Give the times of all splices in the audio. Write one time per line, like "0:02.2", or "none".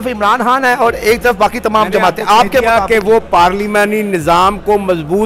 none